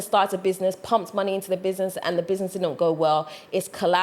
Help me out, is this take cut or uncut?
uncut